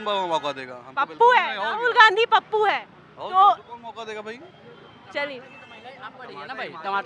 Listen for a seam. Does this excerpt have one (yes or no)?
no